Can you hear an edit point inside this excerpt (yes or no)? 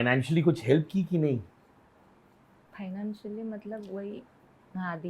no